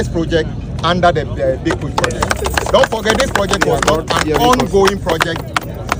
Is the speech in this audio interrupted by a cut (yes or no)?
no